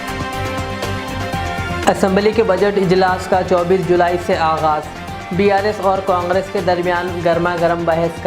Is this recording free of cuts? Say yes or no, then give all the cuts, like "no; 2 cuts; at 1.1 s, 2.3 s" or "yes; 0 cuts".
no; 1 cut; at 1.8 s